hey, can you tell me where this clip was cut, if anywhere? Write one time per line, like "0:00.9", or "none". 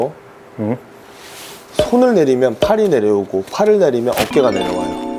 none